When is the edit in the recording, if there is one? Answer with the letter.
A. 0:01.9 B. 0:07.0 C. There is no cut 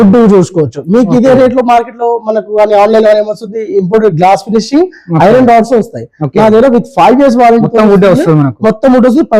C